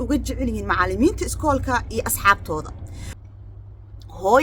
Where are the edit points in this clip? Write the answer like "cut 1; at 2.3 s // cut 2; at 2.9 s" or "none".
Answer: cut 1; at 3.1 s